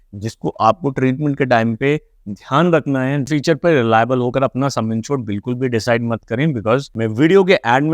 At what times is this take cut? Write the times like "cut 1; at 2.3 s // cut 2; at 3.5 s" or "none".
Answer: cut 1; at 3.3 s // cut 2; at 6.9 s